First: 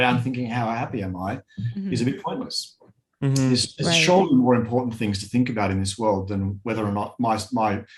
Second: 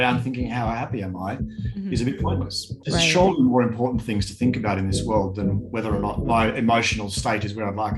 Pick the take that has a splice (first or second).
second